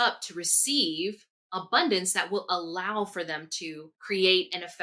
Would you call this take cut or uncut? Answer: cut